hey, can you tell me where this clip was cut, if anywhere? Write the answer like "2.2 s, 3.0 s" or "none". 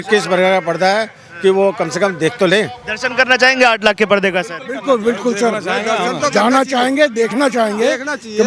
none